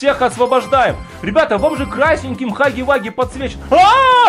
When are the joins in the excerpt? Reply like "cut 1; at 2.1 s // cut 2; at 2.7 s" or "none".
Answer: none